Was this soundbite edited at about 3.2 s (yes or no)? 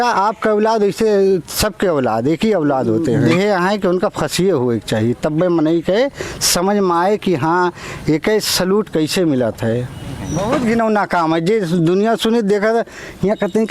yes